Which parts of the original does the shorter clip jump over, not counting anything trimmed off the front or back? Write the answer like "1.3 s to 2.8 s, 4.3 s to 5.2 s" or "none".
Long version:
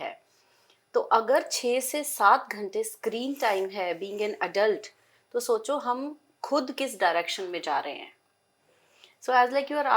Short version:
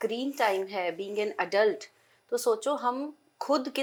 none